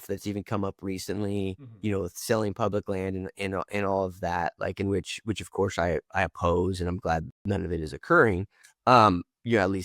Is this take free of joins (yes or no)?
no